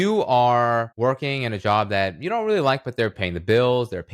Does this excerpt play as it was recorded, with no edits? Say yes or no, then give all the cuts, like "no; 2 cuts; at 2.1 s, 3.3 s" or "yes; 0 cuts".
no; 2 cuts; at 0.9 s, 3.3 s